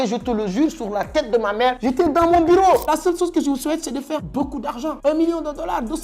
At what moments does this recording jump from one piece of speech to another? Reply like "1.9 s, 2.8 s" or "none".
2.9 s, 4.3 s

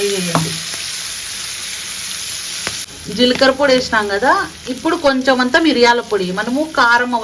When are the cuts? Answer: 2.8 s

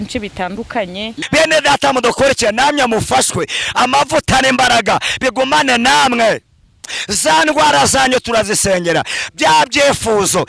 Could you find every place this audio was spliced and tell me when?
1.1 s

